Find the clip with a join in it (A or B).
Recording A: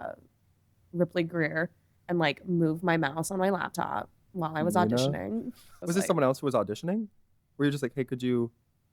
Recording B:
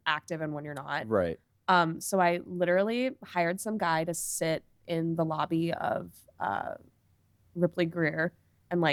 A